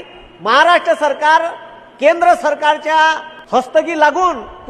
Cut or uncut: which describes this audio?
cut